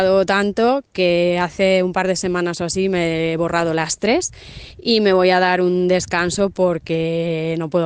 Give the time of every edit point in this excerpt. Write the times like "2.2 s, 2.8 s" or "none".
none